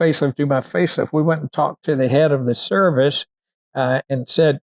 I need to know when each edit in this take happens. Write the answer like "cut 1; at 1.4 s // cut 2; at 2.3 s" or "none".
none